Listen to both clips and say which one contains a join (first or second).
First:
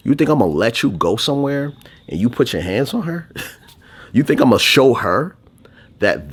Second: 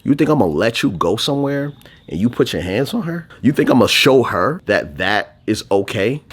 second